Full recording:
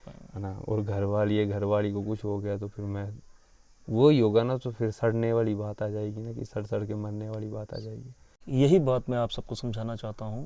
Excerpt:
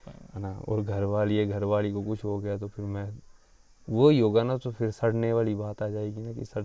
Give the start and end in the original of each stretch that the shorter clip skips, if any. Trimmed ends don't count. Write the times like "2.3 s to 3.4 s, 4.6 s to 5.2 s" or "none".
none